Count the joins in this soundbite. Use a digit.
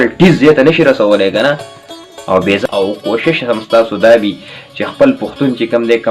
1